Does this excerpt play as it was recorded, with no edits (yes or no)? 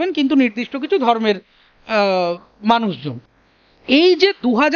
yes